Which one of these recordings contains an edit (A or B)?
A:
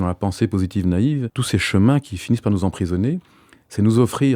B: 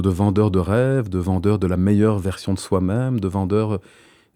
A